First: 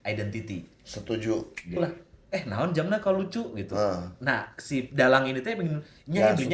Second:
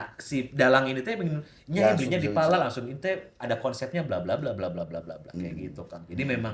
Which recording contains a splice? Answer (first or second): first